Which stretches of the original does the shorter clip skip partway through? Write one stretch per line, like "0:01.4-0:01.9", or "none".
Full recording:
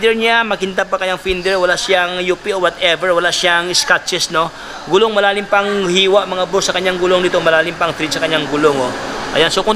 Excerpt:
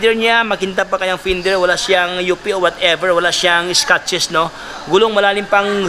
none